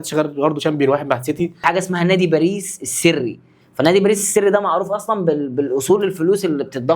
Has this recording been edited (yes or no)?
yes